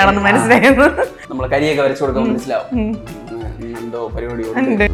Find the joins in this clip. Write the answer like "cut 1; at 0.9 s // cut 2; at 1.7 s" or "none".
none